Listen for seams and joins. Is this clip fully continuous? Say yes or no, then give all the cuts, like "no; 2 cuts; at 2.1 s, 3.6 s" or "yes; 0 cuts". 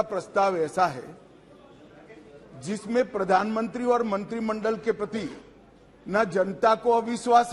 yes; 0 cuts